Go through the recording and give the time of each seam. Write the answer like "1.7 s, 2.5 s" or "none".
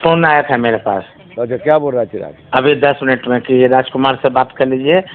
none

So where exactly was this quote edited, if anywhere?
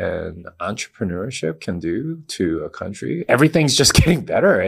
3.2 s

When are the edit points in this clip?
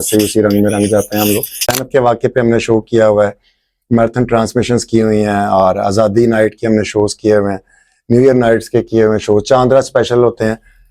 1.8 s

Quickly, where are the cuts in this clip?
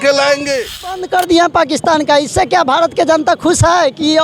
1.0 s

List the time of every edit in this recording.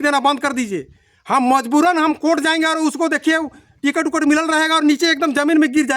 none

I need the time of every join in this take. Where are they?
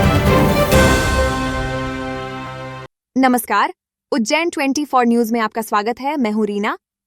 none

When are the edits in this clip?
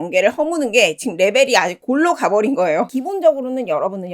2.9 s

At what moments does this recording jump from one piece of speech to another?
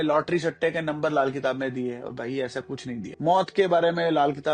3.1 s

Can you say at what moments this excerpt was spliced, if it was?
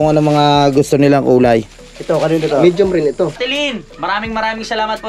3.4 s

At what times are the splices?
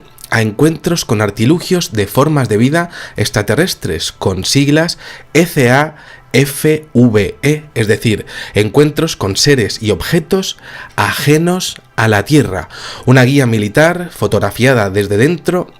13.0 s

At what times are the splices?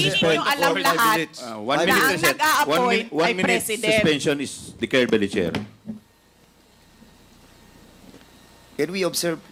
none

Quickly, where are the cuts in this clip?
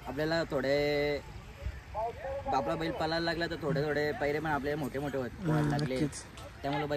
none

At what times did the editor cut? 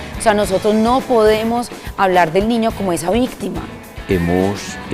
3.9 s

